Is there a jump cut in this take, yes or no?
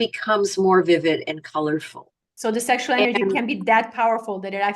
yes